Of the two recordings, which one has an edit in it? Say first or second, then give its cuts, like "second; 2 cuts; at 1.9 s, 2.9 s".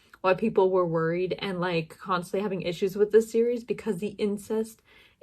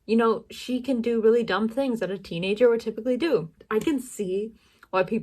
second; 1 cut; at 3.6 s